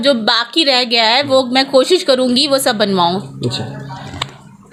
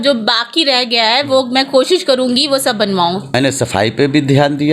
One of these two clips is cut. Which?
second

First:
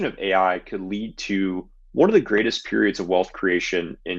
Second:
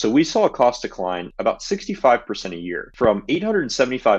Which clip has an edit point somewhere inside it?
second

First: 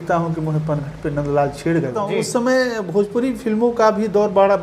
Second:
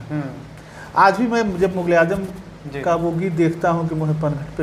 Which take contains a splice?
first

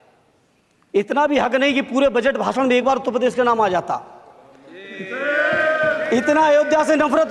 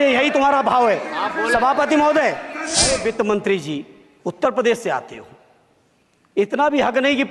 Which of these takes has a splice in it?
second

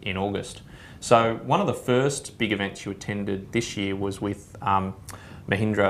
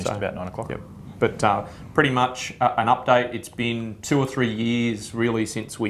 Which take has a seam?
second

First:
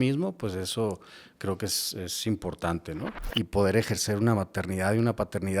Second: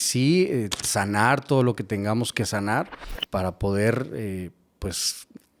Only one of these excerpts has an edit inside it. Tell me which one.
first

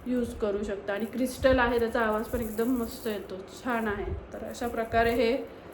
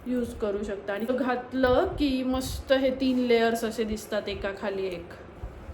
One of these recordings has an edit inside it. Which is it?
second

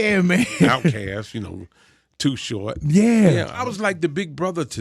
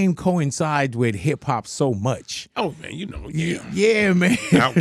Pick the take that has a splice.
first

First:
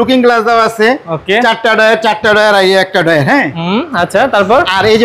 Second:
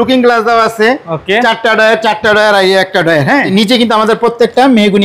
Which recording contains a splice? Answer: second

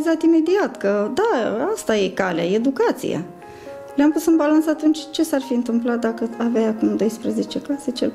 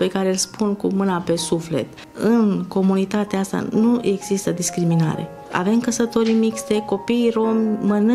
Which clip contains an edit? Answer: second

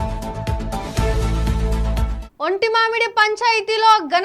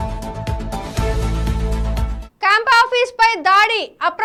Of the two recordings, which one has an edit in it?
first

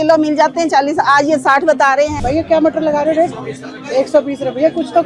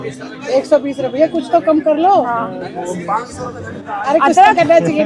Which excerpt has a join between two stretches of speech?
first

